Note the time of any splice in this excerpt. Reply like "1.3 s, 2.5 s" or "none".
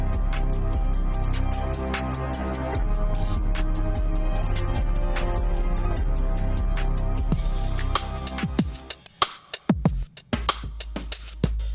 8.4 s